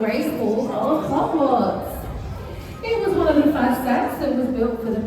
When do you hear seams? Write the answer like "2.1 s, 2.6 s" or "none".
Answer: none